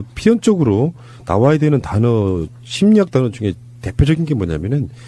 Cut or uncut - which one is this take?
uncut